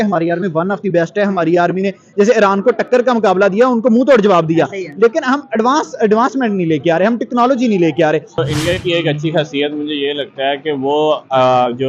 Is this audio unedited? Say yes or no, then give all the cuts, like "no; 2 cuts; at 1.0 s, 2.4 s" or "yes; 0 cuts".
no; 1 cut; at 8.3 s